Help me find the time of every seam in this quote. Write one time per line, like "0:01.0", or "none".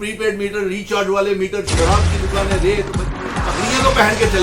0:03.3